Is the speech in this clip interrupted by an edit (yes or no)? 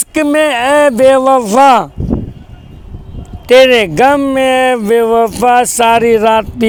no